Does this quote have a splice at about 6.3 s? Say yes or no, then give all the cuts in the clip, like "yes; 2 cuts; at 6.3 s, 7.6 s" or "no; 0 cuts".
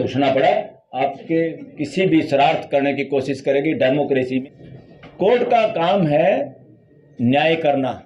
no; 1 cut; at 4.4 s